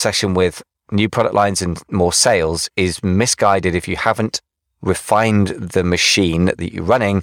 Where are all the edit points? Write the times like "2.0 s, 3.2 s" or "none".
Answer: none